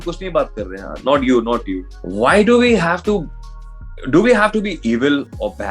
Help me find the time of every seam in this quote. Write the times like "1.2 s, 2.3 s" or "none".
2.0 s